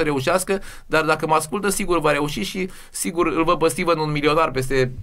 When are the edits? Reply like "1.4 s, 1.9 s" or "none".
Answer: none